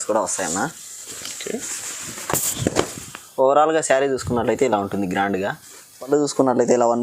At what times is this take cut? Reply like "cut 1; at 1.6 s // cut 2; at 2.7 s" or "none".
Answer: cut 1; at 6.1 s